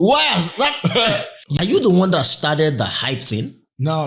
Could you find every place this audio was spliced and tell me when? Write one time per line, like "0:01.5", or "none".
0:01.5